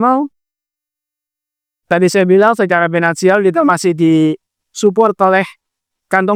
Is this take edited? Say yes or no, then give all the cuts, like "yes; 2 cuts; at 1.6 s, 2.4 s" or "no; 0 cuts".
no; 0 cuts